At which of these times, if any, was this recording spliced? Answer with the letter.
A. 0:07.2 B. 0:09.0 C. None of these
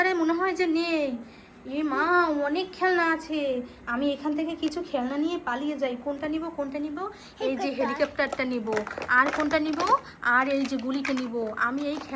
C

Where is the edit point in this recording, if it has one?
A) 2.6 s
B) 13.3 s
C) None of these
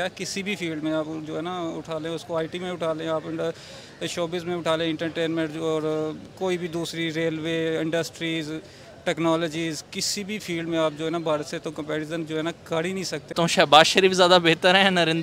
B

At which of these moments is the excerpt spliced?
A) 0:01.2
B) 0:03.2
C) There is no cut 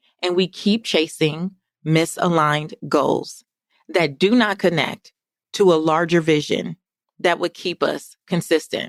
C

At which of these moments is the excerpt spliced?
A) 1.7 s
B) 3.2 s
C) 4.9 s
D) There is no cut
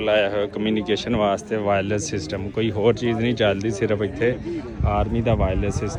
D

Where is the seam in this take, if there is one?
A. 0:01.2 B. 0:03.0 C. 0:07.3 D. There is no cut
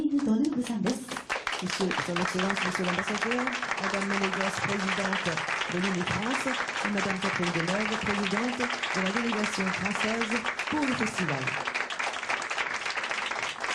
A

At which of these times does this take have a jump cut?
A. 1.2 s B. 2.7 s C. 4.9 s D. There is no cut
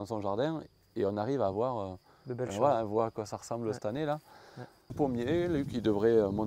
C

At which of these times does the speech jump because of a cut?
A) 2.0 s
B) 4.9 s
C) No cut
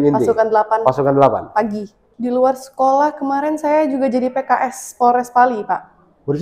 A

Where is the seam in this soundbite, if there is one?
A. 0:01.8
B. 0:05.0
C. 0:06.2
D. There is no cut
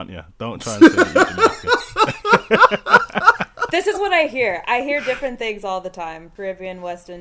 C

